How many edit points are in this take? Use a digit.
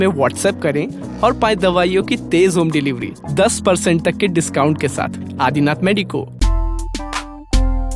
1